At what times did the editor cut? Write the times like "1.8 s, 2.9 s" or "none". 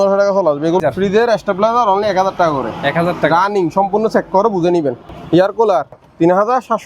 0.8 s, 5.1 s, 6.0 s